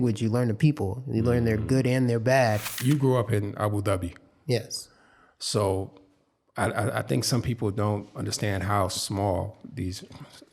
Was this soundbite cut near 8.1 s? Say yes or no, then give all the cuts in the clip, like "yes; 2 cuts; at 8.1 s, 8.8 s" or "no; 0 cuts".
no; 1 cut; at 2.7 s